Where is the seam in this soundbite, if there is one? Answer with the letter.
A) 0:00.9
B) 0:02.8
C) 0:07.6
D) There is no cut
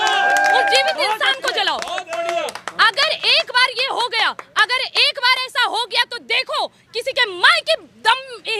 D